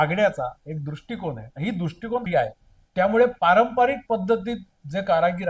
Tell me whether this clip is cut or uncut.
cut